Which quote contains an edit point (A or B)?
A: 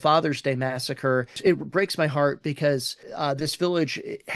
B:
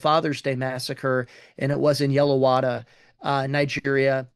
A